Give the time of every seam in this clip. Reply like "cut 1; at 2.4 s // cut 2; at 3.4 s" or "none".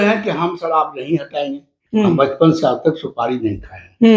cut 1; at 1.7 s